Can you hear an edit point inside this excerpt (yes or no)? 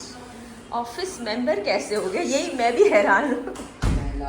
no